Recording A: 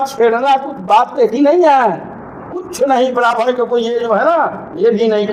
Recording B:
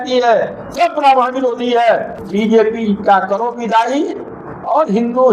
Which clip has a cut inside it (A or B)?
B